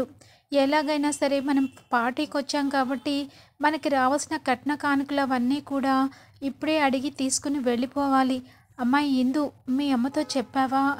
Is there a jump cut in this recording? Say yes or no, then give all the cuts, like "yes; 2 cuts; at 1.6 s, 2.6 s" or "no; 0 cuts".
no; 0 cuts